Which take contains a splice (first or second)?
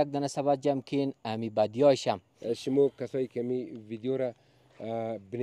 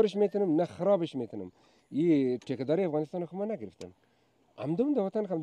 first